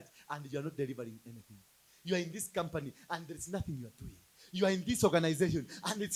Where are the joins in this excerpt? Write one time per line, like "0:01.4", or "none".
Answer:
none